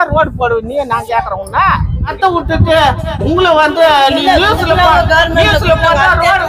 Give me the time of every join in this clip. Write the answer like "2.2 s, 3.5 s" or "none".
2.1 s